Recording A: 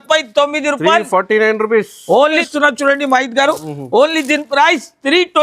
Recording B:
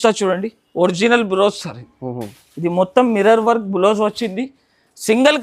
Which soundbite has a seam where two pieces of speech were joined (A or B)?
A